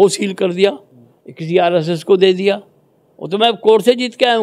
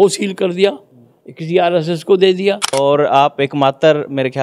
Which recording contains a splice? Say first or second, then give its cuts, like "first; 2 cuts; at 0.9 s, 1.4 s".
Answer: second; 1 cut; at 2.8 s